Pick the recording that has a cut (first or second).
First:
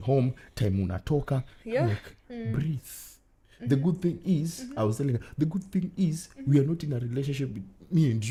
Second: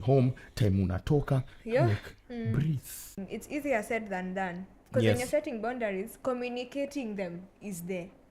second